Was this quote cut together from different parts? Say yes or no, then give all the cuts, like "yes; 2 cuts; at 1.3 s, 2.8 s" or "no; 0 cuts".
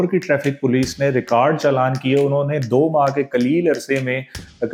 no; 0 cuts